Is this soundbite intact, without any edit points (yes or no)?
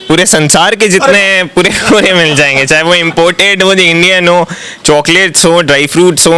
yes